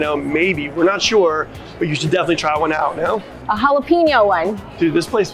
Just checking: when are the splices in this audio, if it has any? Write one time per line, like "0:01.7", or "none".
none